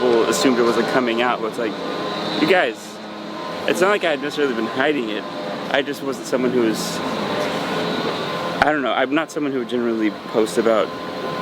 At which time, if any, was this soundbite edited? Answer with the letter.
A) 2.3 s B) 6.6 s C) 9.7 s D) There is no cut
D